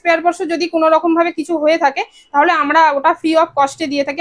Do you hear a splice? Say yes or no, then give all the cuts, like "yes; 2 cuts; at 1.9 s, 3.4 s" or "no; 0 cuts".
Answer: no; 0 cuts